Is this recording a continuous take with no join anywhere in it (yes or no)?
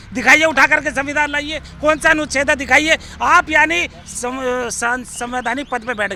yes